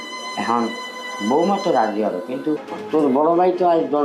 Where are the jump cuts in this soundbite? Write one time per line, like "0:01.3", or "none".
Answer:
0:02.7